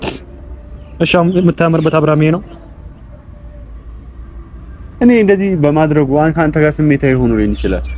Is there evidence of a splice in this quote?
no; 0 cuts

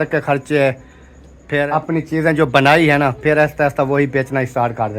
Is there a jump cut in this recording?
yes; 1 cut; at 1.6 s

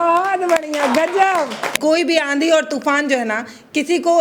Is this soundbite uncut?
no; 1 cut; at 1.7 s

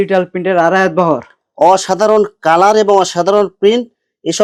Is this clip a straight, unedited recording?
yes; 0 cuts

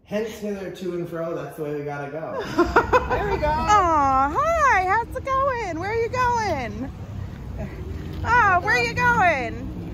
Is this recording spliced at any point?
yes; 1 cut; at 3.2 s

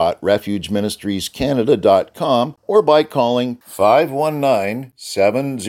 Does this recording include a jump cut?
yes; 1 cut; at 2.6 s

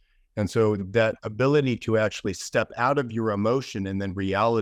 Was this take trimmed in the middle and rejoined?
no; 0 cuts

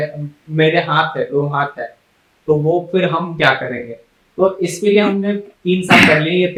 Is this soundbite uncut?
yes; 0 cuts

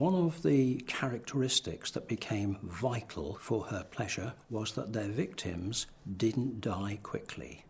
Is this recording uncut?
no; 1 cut; at 4.4 s

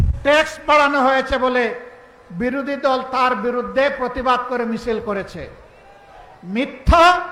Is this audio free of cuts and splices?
yes; 0 cuts

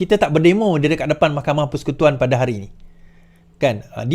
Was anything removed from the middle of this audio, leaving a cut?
no; 0 cuts

